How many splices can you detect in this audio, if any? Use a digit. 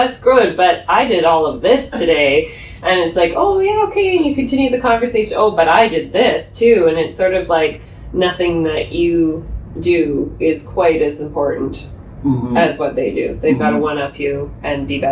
0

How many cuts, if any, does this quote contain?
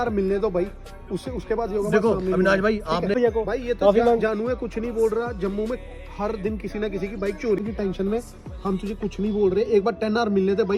2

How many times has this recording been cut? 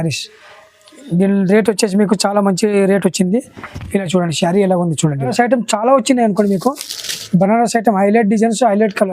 1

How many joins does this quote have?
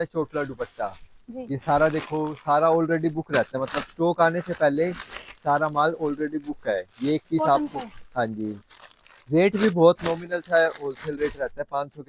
0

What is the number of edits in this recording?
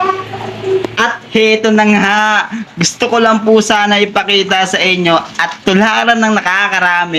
0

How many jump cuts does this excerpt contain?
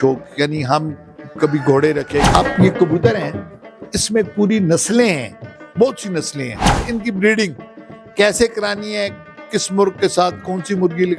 2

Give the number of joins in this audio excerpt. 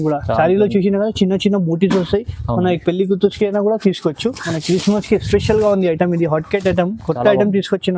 1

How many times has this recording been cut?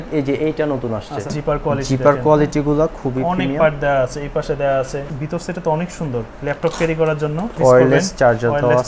3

